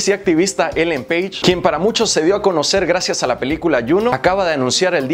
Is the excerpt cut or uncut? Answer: uncut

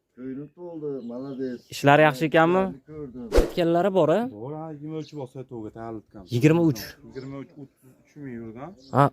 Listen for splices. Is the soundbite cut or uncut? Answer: cut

